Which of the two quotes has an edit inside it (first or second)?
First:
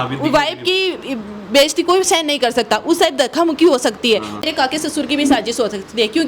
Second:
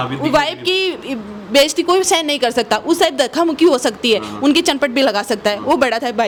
first